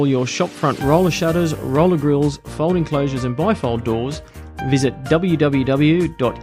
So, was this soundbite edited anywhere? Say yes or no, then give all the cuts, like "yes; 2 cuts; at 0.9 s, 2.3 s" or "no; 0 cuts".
no; 0 cuts